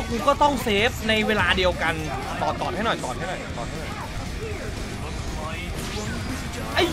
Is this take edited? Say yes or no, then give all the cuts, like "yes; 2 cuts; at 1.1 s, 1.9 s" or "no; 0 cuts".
yes; 1 cut; at 2.2 s